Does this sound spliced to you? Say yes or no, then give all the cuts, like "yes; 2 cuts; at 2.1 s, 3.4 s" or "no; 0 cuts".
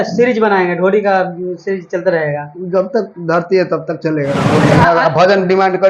yes; 1 cut; at 4.4 s